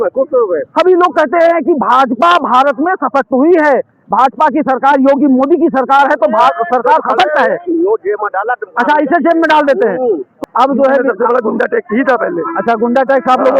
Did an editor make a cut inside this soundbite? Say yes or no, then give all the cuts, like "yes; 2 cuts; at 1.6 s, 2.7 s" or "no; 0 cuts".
yes; 1 cut; at 10.3 s